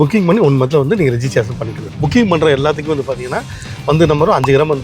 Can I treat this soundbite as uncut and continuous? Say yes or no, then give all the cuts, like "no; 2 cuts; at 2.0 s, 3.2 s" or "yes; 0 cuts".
no; 1 cut; at 1.9 s